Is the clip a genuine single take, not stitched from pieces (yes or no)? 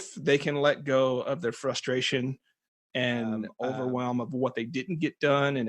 no